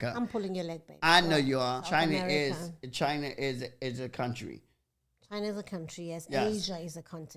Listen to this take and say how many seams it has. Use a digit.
1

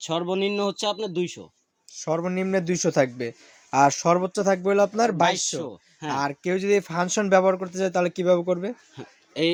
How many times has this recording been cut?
0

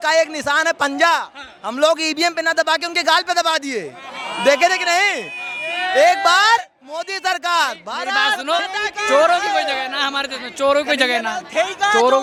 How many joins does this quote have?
0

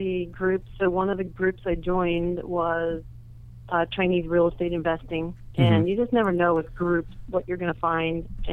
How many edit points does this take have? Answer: 0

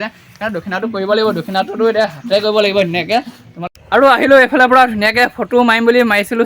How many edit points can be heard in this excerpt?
1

